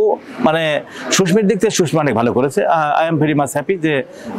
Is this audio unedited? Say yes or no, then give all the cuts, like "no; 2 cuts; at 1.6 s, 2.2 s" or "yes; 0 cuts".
yes; 0 cuts